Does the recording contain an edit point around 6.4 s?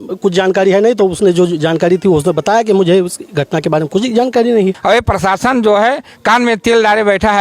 no; 1 cut; at 4.8 s

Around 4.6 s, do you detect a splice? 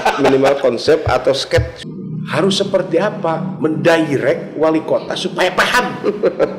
no; 1 cut; at 1.7 s

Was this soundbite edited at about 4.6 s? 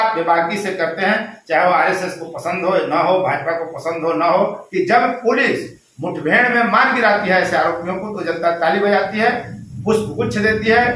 yes; 1 cut; at 4.6 s

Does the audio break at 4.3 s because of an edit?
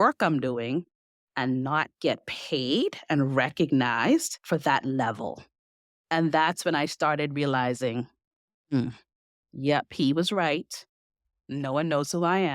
yes; 1 cut; at 4.3 s

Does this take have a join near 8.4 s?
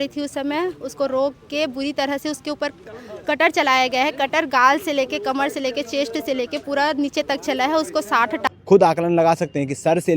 yes; 1 cut; at 8.4 s

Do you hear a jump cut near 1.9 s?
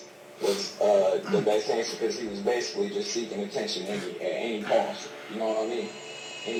no; 0 cuts

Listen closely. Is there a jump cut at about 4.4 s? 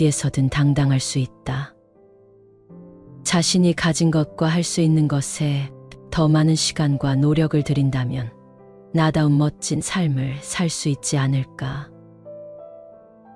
no; 0 cuts

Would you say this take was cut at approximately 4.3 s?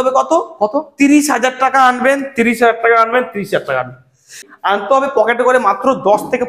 yes; 1 cut; at 4.3 s

